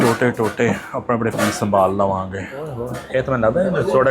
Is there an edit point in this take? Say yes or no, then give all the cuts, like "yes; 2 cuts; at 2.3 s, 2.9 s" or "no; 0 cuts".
yes; 1 cut; at 2.9 s